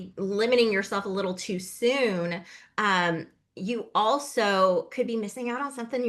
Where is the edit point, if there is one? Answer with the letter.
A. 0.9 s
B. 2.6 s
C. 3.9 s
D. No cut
D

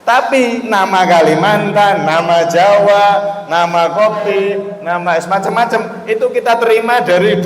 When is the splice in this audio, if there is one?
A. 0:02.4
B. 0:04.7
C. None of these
B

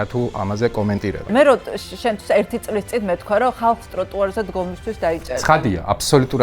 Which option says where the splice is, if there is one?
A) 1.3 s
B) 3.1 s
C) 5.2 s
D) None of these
A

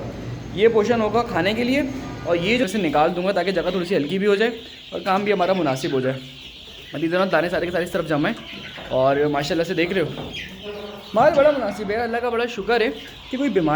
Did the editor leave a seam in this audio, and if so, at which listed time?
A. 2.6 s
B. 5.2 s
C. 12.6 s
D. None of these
A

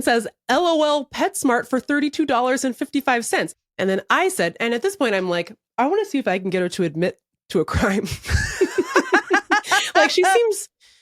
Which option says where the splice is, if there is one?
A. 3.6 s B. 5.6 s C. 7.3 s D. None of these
A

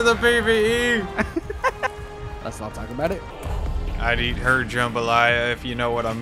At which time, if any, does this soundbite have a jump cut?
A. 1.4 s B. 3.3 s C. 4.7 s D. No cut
B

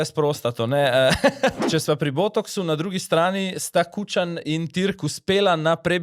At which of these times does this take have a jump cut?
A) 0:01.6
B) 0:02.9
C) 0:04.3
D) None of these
A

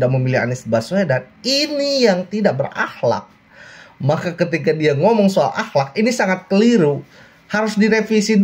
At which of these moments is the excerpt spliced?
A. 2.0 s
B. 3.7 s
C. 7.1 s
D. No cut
D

